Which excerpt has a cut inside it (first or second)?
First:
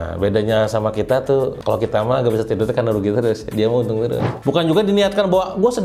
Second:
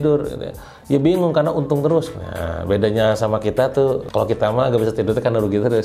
first